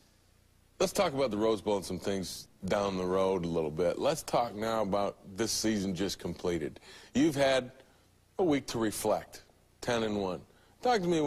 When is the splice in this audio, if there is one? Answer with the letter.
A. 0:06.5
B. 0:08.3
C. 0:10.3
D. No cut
A